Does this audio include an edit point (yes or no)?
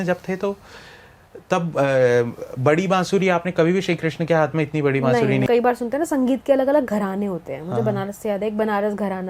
yes